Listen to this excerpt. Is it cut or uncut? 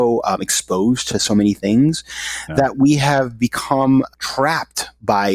cut